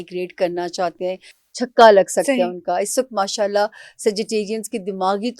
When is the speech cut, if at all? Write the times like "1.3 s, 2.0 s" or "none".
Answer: none